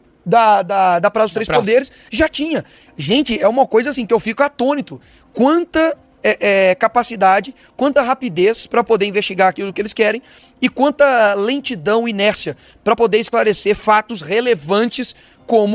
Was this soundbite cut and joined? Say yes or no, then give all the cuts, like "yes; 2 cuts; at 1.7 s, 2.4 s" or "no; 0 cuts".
no; 0 cuts